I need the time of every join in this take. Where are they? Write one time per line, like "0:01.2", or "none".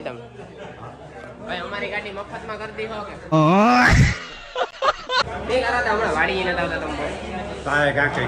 0:03.3
0:05.2

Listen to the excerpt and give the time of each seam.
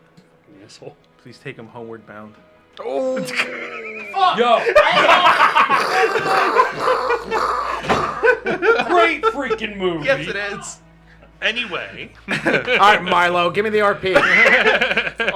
none

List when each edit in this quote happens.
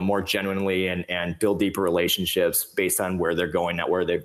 none

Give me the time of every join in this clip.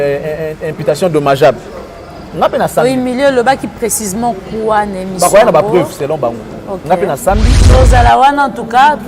0:07.6

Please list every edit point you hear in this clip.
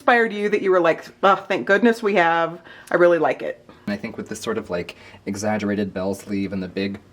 0:03.9

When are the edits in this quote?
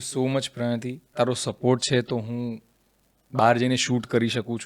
0:01.1

